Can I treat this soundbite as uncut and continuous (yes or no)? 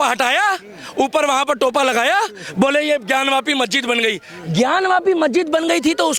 yes